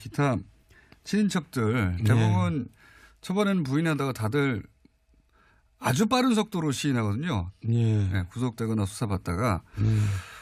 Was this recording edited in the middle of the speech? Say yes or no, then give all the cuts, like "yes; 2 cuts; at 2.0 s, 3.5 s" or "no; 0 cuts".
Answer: no; 0 cuts